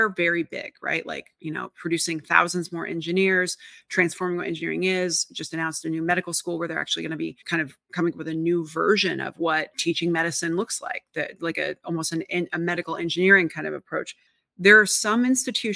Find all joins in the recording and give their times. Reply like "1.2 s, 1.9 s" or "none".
14.2 s